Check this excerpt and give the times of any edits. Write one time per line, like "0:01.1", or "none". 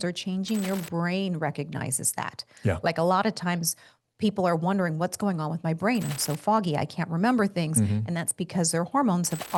none